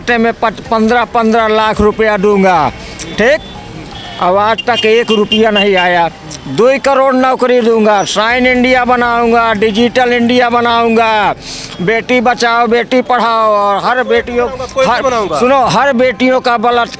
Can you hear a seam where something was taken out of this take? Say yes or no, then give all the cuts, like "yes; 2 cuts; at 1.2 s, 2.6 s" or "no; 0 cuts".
no; 0 cuts